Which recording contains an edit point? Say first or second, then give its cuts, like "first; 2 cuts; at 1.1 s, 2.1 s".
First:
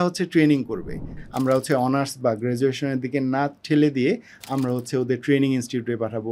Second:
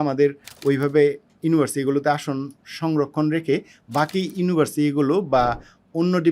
first; 1 cut; at 1.2 s